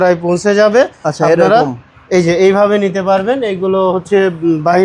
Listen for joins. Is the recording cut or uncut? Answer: uncut